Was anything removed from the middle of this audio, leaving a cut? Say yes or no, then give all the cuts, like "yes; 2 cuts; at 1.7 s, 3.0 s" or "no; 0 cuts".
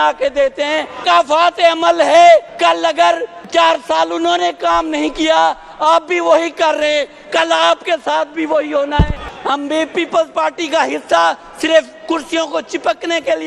yes; 3 cuts; at 1.0 s, 2.9 s, 9.3 s